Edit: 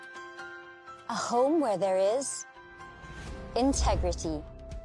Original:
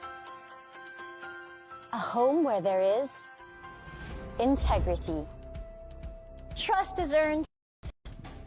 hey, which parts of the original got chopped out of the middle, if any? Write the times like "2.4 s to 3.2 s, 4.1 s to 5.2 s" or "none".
none